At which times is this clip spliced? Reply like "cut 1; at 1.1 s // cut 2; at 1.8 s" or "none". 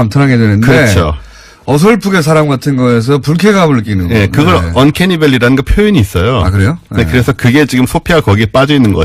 none